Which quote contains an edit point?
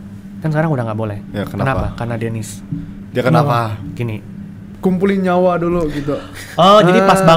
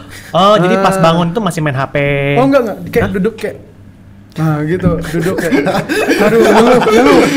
first; 1 cut; at 4.7 s

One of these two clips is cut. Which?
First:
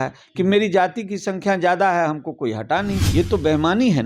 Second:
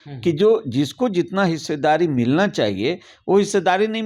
first; 1 cut; at 3.0 s

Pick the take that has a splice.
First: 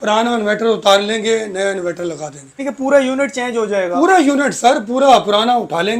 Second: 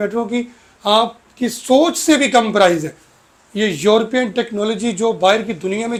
first; 1 cut; at 2.6 s

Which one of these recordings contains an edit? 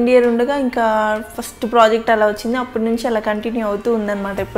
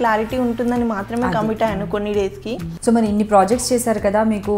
second; 1 cut; at 2.7 s

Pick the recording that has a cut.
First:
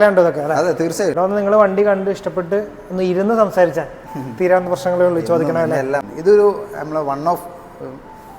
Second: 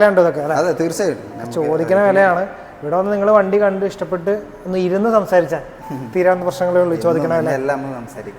first; 2 cuts; at 1.1 s, 6.1 s

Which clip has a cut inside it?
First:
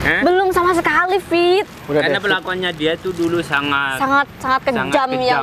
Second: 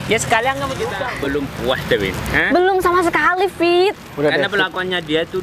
second; 1 cut; at 1.0 s

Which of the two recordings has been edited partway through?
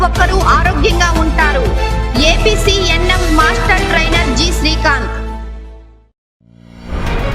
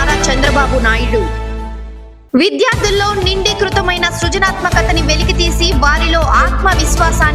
first; 1 cut; at 6.3 s

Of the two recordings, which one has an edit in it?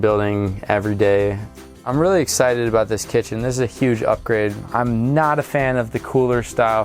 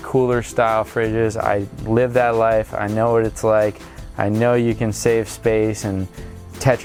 first; 2 cuts; at 1.9 s, 4.6 s

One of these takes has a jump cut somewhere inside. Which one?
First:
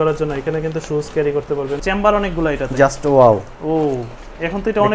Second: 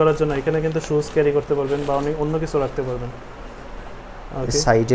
first; 1 cut; at 1.8 s

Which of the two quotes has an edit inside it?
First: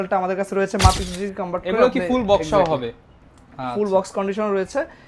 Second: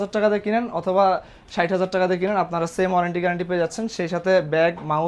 first; 1 cut; at 1.0 s

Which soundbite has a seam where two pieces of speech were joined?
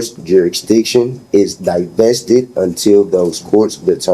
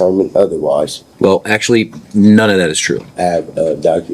second; 2 cuts; at 1.0 s, 2.6 s

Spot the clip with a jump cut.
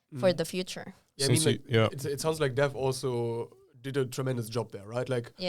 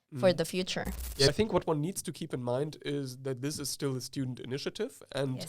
second; 1 cut; at 1.3 s

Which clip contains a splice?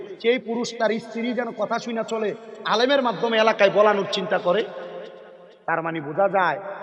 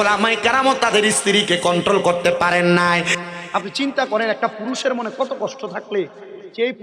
second; 1 cut; at 3.1 s

